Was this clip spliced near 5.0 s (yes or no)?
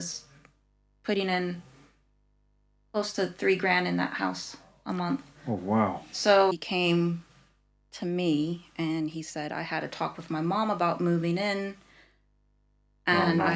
no